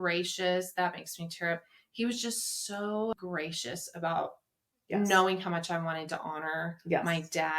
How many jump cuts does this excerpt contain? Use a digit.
1